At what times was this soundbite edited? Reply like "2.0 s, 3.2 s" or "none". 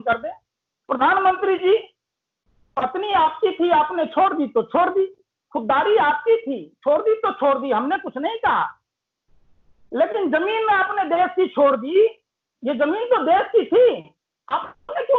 none